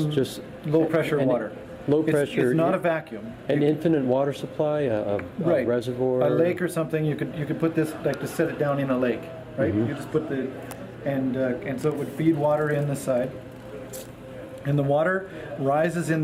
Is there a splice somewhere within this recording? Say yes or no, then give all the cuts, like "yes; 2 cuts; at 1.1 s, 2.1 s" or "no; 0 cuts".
no; 0 cuts